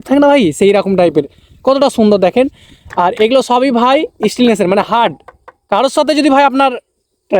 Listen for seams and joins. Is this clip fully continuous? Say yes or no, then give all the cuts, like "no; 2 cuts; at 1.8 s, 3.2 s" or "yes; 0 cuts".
yes; 0 cuts